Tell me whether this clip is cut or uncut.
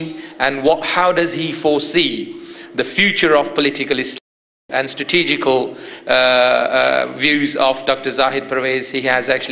uncut